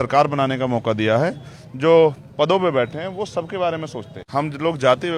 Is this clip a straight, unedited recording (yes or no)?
no